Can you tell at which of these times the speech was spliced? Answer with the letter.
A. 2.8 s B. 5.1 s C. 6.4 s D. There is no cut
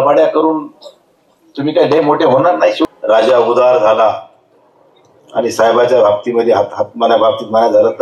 A